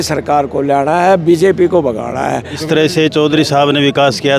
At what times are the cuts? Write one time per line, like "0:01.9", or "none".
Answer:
0:02.6